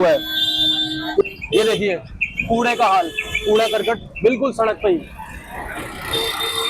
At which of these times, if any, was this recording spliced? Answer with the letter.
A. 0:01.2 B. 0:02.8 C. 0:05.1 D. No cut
A